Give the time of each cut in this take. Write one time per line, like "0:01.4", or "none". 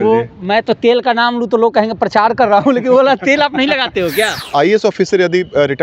0:04.4